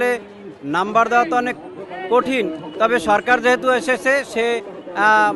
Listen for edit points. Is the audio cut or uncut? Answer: uncut